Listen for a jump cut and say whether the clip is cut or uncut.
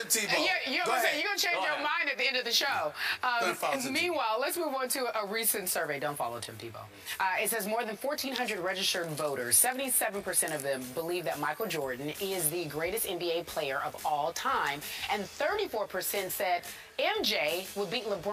cut